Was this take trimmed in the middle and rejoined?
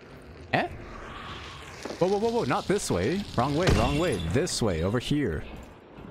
no; 0 cuts

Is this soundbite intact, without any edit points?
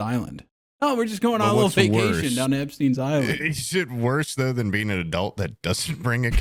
yes; 0 cuts

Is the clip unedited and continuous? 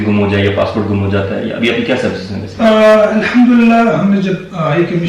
yes; 0 cuts

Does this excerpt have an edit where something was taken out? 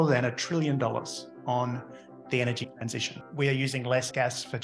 yes; 1 cut; at 3.2 s

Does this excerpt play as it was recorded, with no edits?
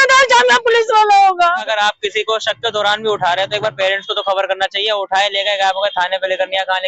no; 1 cut; at 1.6 s

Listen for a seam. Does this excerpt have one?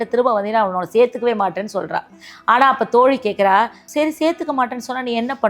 yes; 1 cut; at 3.8 s

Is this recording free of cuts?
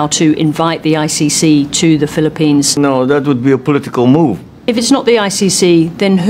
no; 2 cuts; at 2.7 s, 4.5 s

